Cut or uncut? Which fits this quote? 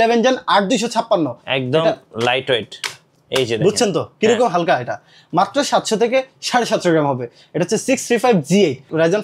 cut